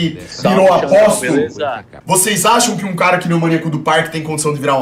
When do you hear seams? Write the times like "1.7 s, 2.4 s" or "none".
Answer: 1.9 s